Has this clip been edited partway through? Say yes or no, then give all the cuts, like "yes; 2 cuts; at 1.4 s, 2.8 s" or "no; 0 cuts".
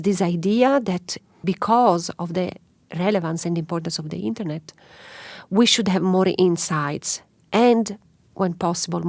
no; 0 cuts